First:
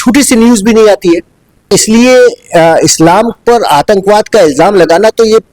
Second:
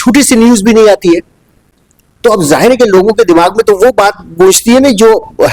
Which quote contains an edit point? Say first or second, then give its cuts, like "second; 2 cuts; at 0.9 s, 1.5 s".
first; 1 cut; at 1.7 s